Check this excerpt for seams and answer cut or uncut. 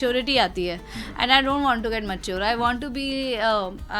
uncut